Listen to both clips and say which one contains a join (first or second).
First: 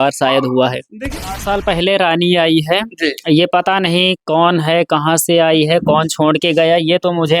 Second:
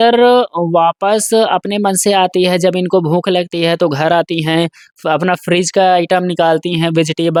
first